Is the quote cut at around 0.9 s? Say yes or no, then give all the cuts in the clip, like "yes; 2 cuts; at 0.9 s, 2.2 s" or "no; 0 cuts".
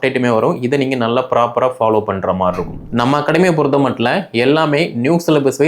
no; 1 cut; at 2.7 s